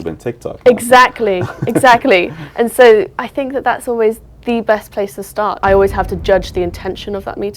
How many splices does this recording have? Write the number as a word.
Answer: one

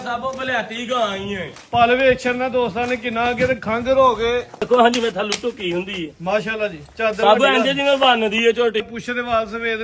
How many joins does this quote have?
two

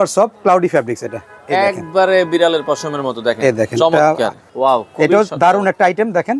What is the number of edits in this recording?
one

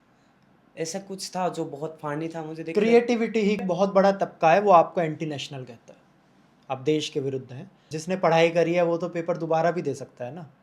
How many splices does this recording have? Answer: two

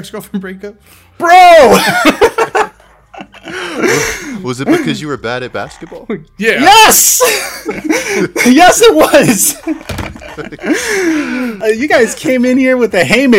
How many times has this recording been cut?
one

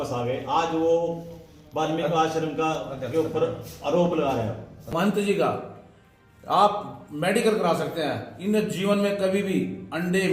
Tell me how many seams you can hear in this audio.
one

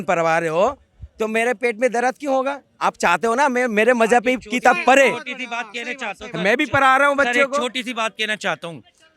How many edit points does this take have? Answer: zero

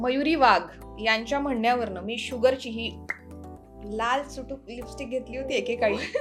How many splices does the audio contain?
zero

